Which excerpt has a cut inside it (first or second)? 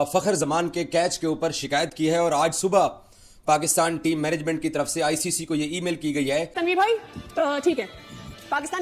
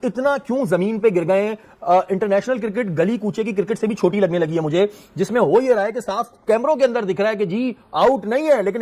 first